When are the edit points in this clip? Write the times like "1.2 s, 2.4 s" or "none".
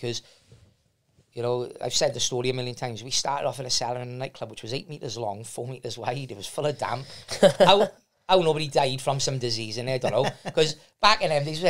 none